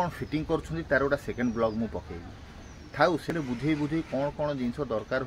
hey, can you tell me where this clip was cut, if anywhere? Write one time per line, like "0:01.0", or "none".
0:03.3